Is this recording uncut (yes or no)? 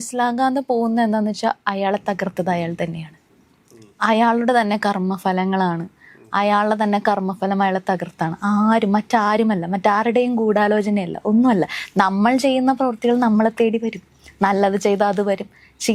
yes